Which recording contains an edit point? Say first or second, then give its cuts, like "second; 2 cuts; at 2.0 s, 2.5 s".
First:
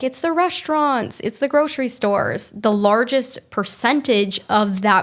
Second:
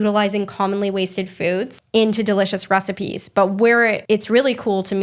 second; 2 cuts; at 1.7 s, 4.0 s